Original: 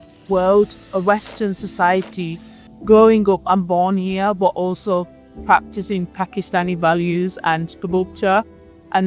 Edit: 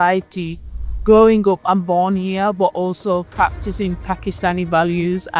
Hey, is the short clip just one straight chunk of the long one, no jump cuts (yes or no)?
no